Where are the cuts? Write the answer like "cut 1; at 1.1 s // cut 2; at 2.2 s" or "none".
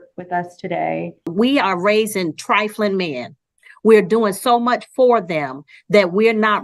cut 1; at 1.3 s

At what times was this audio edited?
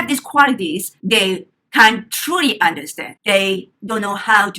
cut 1; at 0.9 s

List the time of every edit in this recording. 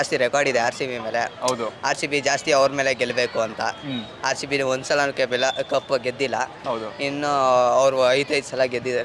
none

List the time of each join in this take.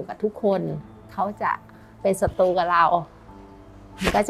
cut 1; at 1.1 s

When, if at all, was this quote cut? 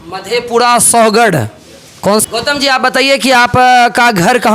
cut 1; at 2.2 s

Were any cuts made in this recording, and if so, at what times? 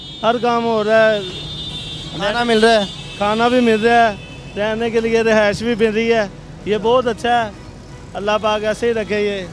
none

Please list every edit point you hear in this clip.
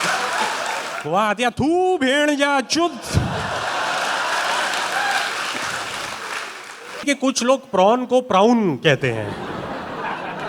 cut 1; at 7.0 s

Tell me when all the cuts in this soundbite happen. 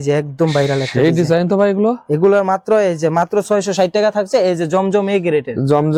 none

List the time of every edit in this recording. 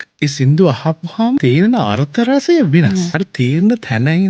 cut 1; at 1.4 s // cut 2; at 3.2 s

